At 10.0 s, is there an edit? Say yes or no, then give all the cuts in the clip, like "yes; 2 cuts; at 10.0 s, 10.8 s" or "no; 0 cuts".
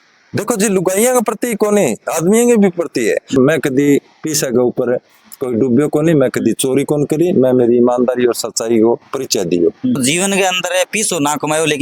yes; 2 cuts; at 3.4 s, 10.0 s